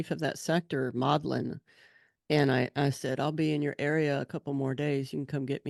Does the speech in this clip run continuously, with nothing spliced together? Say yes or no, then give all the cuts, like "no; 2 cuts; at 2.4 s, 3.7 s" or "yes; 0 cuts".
yes; 0 cuts